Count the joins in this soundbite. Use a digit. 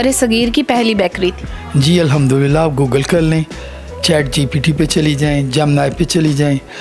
0